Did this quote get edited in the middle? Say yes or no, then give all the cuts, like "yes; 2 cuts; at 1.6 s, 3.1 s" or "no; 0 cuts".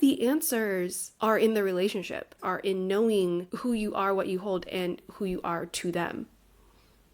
yes; 3 cuts; at 1.0 s, 2.5 s, 3.5 s